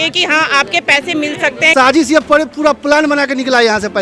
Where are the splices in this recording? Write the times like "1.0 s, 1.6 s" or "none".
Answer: 1.7 s